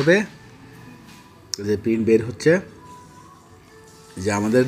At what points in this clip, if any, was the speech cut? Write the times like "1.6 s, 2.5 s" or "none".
none

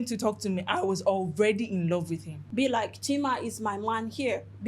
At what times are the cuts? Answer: 2.3 s

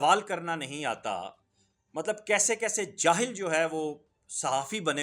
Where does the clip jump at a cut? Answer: none

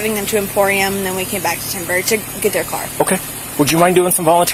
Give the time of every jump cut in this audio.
none

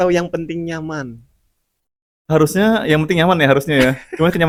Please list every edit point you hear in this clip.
none

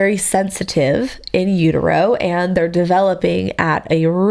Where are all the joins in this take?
none

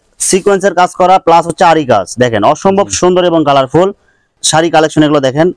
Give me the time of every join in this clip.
4.3 s

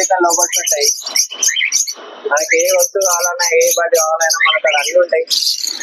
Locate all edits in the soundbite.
none

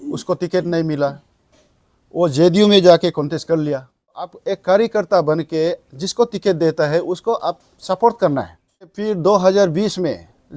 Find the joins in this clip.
4.3 s, 8.9 s

